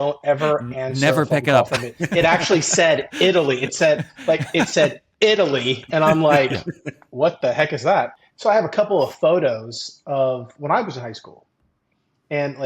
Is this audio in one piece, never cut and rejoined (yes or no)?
no